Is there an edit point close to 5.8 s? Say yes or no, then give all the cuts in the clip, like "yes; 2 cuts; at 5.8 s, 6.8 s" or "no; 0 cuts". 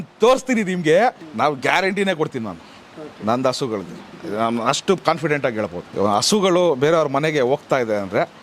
yes; 2 cuts; at 1.2 s, 5.8 s